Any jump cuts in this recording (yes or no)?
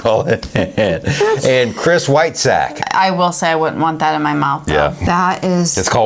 yes